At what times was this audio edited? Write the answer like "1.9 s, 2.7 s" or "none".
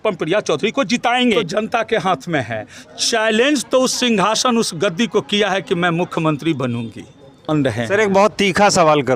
1.4 s, 7.5 s